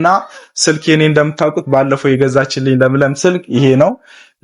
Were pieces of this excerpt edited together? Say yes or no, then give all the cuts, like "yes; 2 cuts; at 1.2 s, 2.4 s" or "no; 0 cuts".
no; 0 cuts